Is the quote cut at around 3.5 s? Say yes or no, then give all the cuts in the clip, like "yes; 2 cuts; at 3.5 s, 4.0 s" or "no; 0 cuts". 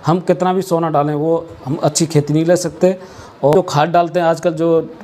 yes; 1 cut; at 3.5 s